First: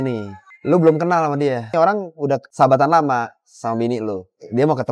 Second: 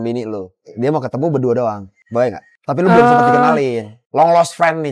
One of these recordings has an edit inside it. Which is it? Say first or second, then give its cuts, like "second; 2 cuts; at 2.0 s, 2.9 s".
first; 1 cut; at 1.7 s